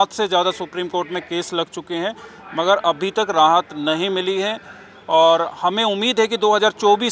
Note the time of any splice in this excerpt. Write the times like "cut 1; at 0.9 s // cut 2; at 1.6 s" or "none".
none